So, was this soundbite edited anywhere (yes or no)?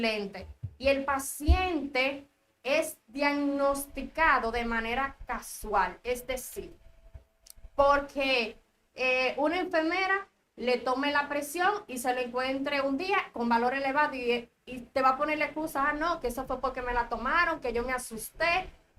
no